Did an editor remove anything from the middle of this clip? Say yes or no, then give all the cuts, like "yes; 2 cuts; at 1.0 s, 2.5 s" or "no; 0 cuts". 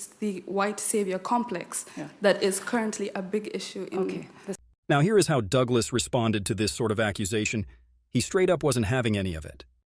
no; 0 cuts